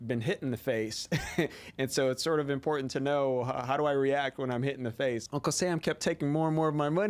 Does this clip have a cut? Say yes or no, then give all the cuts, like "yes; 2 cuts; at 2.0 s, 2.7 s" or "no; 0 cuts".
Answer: yes; 1 cut; at 5.2 s